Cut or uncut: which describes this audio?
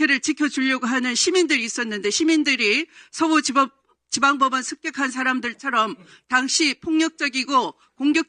uncut